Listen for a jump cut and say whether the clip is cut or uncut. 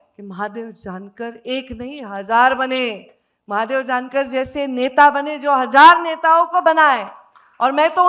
uncut